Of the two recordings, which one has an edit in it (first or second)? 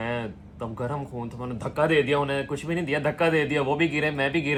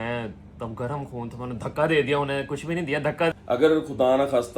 second